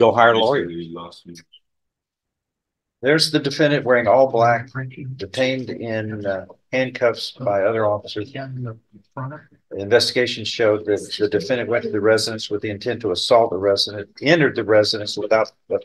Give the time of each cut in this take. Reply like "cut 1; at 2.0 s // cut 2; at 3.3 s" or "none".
cut 1; at 1.2 s